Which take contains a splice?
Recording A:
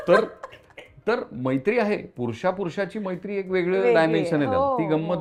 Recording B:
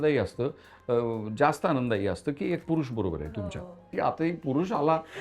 B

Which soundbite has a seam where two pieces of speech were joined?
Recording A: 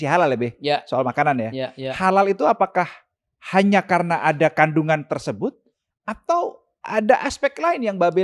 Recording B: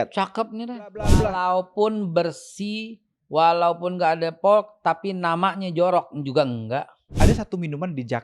B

